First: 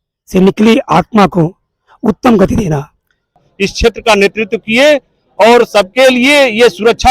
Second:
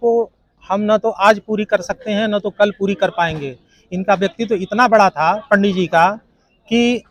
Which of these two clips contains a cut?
first; 1 cut; at 3.4 s

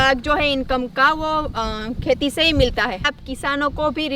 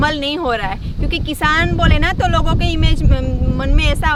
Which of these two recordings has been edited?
first; 1 cut; at 3.1 s

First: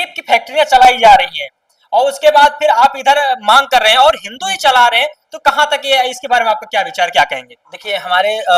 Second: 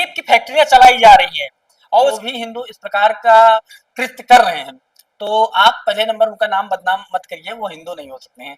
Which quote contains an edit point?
second; 1 cut; at 2.2 s

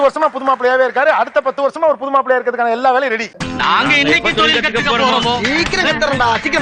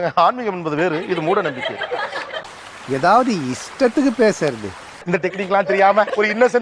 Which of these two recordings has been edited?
second; 1 cut; at 5.0 s

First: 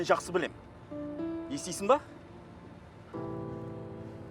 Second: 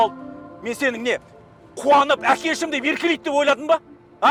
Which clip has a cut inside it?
first; 1 cut; at 2.2 s

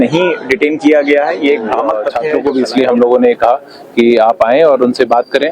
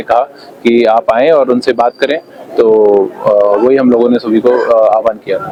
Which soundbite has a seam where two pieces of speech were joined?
first; 1 cut; at 2.2 s

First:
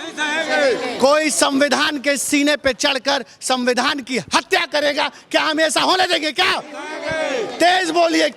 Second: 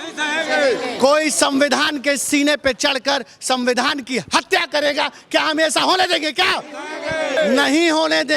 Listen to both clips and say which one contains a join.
second; 1 cut; at 7.4 s

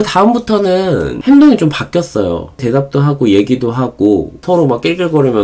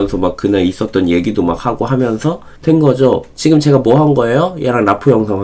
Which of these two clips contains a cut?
first; 3 cuts; at 1.1 s, 2.6 s, 4.4 s

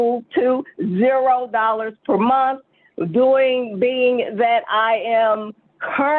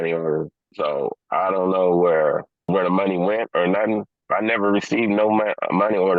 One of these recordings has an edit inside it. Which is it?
second; 2 cuts; at 2.6 s, 4.1 s

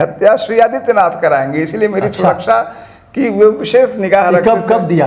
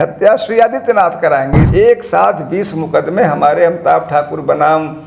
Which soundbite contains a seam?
second; 1 cut; at 1.6 s

